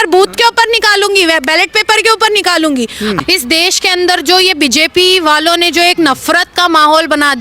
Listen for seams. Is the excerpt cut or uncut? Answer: cut